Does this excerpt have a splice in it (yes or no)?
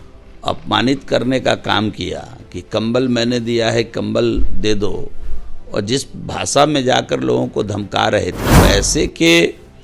yes